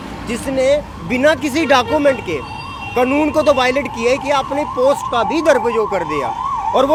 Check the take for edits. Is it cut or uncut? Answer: uncut